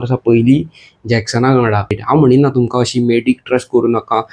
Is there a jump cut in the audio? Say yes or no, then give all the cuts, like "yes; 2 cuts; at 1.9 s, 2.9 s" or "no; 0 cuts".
yes; 1 cut; at 2.0 s